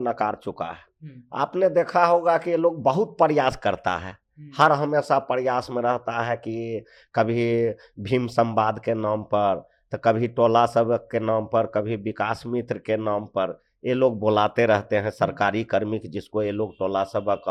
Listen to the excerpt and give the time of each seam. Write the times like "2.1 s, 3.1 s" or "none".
none